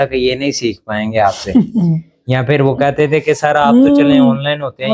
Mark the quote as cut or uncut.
uncut